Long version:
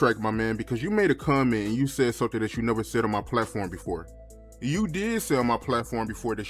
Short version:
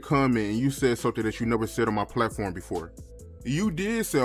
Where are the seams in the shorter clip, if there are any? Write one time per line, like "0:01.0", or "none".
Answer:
none